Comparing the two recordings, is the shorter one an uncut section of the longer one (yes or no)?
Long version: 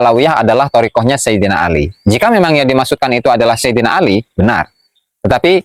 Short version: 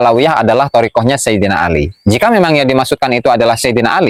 yes